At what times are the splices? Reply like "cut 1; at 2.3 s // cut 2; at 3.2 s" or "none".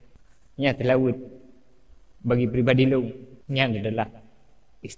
cut 1; at 3.3 s